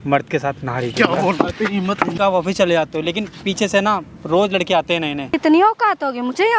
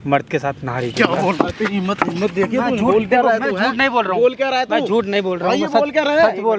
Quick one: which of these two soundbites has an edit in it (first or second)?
first